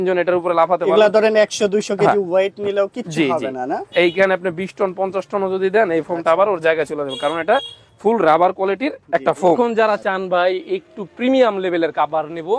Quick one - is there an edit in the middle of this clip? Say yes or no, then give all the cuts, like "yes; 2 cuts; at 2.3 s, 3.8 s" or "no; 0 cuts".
yes; 1 cut; at 9.6 s